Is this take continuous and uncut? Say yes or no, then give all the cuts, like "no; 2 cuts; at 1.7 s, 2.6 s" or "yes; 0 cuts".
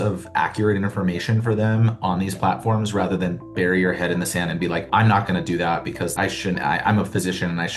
no; 1 cut; at 4.9 s